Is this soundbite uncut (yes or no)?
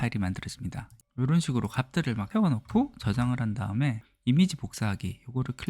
no